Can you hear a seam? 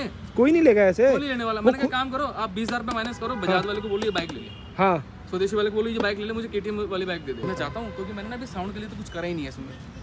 yes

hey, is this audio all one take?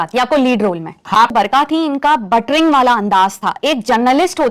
no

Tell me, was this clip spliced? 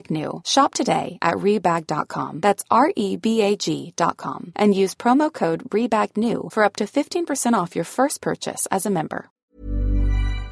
yes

